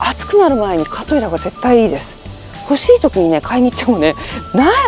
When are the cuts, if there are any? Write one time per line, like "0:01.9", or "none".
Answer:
none

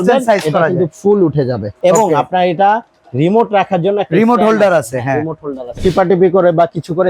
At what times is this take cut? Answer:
0:01.7
0:05.8

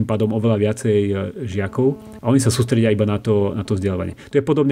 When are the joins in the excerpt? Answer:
0:02.1

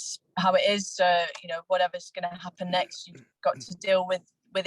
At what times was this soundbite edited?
none

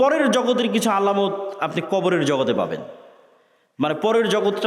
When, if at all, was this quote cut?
none

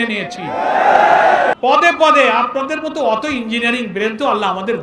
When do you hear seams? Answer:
0:01.6

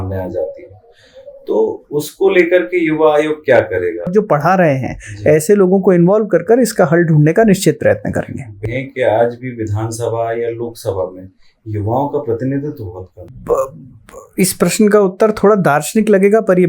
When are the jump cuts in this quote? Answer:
0:04.1
0:08.6
0:13.3

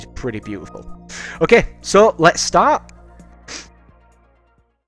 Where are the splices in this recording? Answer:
0:02.1

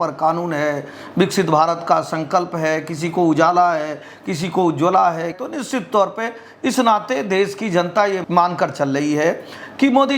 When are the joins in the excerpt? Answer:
0:05.4

